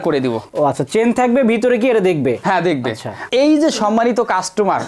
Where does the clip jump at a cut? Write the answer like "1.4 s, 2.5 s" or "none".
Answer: none